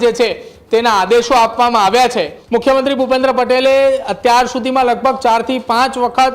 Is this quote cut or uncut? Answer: cut